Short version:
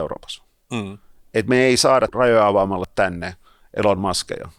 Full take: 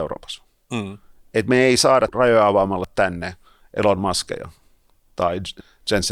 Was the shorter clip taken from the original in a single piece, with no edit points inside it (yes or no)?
yes